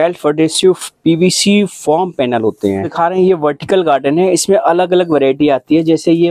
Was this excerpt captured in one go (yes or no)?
no